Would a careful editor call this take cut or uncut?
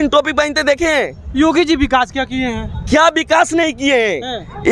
uncut